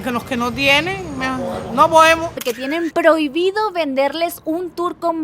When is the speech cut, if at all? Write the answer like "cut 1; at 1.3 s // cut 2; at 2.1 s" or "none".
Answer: cut 1; at 2.4 s